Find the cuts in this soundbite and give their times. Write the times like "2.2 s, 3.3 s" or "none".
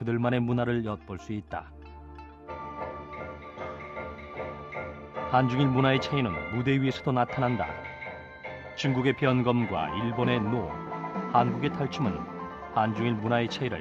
none